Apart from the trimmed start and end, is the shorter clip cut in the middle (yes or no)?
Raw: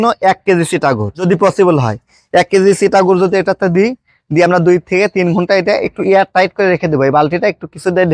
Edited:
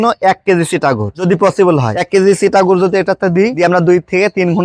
yes